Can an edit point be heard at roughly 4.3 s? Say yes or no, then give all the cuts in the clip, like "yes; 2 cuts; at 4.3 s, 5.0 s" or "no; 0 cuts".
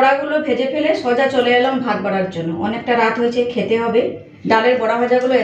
yes; 1 cut; at 4.3 s